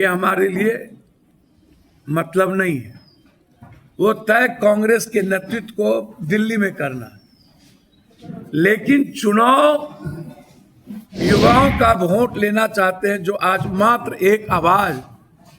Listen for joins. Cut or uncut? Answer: cut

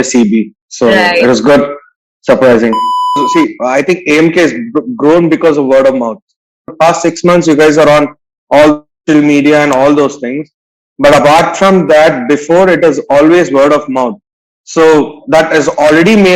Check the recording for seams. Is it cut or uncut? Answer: cut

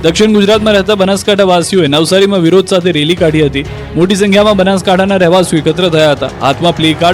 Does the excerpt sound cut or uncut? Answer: uncut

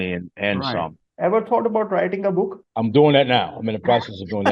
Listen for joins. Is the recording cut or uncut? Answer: cut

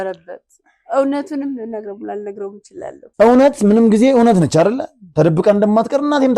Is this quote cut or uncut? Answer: cut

